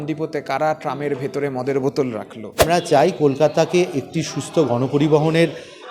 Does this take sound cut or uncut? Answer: cut